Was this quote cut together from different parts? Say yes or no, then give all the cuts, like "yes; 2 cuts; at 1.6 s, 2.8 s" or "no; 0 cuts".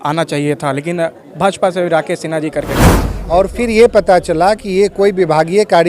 yes; 1 cut; at 3.1 s